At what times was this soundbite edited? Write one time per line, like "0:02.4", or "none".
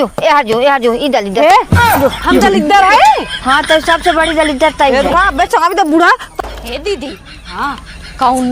0:06.3